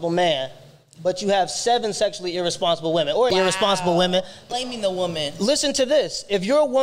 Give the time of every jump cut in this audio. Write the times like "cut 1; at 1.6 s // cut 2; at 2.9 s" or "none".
cut 1; at 3.3 s // cut 2; at 4.5 s